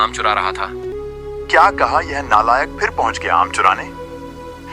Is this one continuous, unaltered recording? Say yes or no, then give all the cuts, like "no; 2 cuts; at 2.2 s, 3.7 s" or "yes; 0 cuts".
no; 1 cut; at 0.9 s